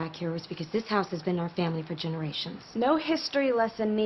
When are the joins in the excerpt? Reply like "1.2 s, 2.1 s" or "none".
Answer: 2.7 s